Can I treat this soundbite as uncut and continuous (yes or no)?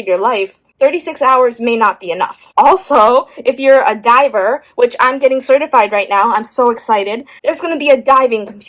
no